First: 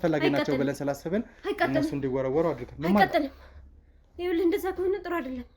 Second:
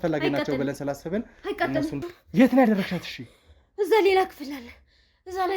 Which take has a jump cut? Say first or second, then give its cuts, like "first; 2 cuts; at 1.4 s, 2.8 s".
second; 1 cut; at 2.0 s